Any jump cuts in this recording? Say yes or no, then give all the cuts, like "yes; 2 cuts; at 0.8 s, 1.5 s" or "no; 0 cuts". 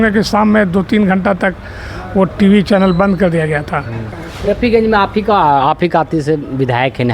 yes; 1 cut; at 4.2 s